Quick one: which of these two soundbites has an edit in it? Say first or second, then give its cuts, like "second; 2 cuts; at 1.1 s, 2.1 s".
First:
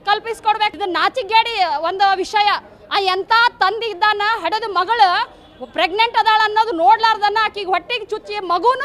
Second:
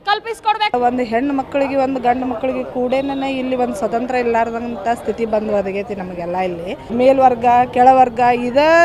second; 2 cuts; at 0.7 s, 6.9 s